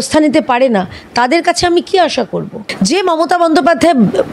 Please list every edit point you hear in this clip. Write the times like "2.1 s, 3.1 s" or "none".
2.7 s